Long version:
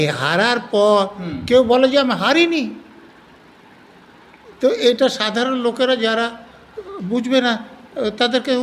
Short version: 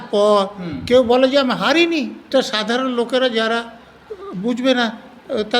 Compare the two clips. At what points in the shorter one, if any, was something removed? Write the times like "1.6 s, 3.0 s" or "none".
2.3 s